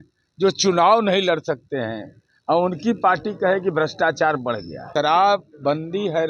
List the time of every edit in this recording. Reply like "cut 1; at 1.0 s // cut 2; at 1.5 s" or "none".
cut 1; at 4.8 s